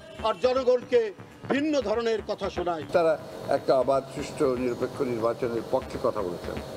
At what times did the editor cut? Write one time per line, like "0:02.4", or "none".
0:02.8